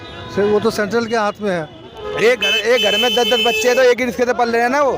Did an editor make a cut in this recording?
yes; 1 cut; at 1.8 s

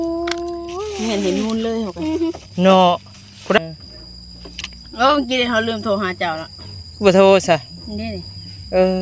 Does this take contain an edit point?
yes; 1 cut; at 3.6 s

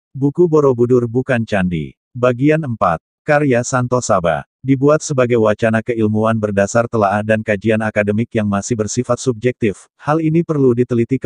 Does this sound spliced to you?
yes; 1 cut; at 2.7 s

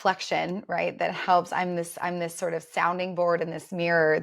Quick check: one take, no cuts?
yes; 0 cuts

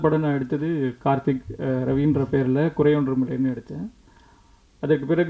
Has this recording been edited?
no; 0 cuts

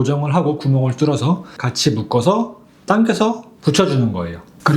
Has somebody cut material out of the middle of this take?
yes; 1 cut; at 1.6 s

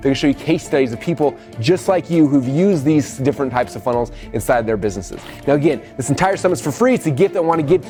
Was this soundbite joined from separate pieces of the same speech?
no; 0 cuts

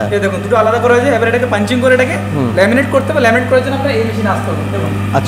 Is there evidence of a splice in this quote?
no; 0 cuts

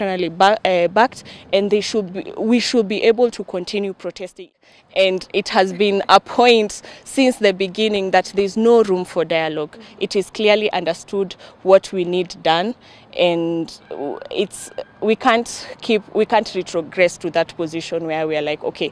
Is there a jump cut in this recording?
yes; 1 cut; at 4.6 s

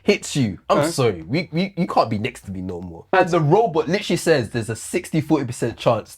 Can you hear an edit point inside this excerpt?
yes; 1 cut; at 3.2 s

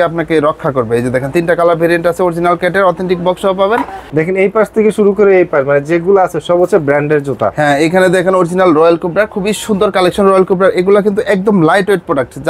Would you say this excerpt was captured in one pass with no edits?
no; 1 cut; at 4.0 s

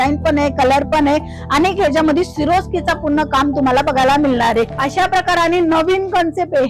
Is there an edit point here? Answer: yes; 1 cut; at 4.8 s

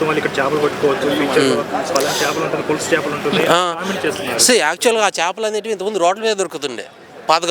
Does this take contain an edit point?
no; 0 cuts

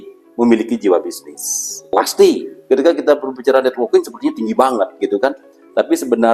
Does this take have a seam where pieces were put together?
yes; 1 cut; at 2.5 s

